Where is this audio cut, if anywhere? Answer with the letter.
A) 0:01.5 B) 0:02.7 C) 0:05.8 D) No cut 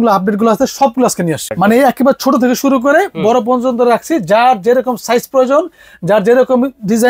A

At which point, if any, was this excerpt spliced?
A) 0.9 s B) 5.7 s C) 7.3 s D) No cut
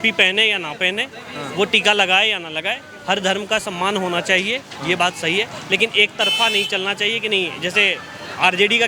D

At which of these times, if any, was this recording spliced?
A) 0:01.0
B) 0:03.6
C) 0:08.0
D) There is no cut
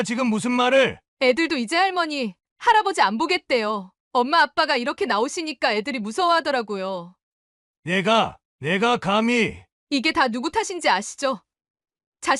A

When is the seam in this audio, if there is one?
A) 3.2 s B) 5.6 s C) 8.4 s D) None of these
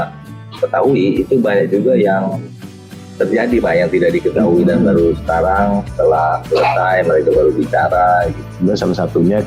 C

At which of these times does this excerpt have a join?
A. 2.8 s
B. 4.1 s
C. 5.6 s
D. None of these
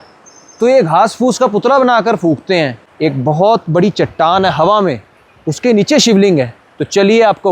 A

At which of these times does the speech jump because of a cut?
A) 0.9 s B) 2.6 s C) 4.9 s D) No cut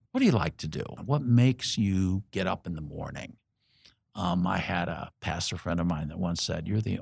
A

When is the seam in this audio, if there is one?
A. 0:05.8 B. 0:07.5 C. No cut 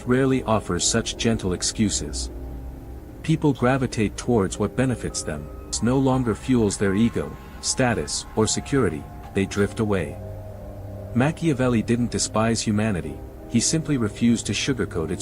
A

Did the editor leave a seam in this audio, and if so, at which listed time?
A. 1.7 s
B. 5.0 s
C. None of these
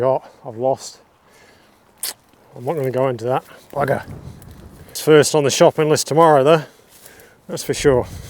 B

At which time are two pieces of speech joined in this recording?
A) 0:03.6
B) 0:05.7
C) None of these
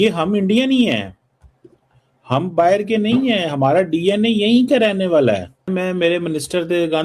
B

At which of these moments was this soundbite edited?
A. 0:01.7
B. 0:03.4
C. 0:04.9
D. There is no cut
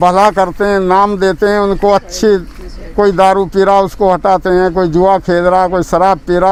D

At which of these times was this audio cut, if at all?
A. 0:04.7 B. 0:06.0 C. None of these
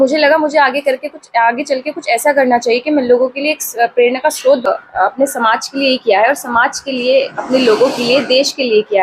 A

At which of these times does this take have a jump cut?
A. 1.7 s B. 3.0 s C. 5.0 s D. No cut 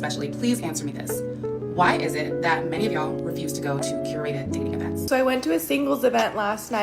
C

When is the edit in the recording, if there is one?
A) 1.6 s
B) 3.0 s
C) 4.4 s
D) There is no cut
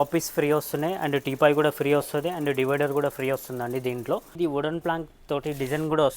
C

